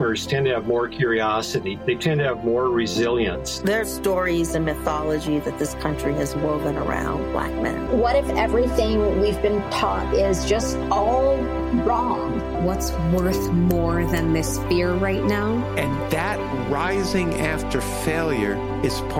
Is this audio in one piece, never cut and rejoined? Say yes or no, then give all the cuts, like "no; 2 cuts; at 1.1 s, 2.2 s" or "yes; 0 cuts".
yes; 0 cuts